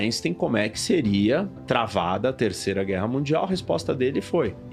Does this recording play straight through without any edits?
yes; 0 cuts

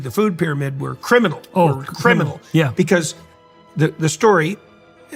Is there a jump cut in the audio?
no; 0 cuts

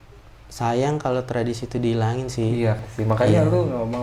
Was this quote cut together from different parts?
yes; 1 cut; at 2.8 s

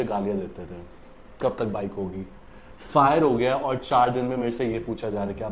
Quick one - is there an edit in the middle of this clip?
no; 0 cuts

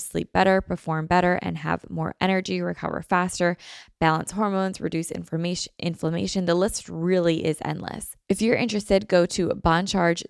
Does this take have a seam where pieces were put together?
yes; 1 cut; at 8.1 s

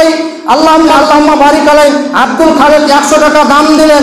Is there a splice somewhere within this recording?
yes; 1 cut; at 0.9 s

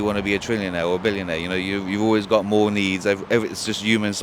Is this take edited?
no; 0 cuts

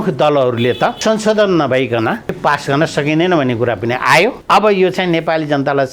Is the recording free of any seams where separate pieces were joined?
no; 3 cuts; at 1.0 s, 2.4 s, 4.4 s

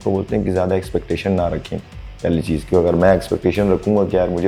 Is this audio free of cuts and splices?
yes; 0 cuts

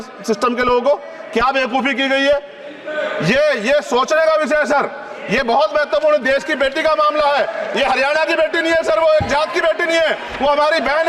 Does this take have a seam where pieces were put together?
no; 0 cuts

